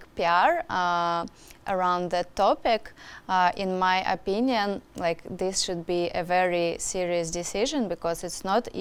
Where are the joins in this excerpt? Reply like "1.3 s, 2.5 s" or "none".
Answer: none